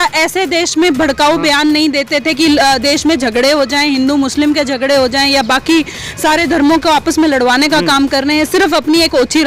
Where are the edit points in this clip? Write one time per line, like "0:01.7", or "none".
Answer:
none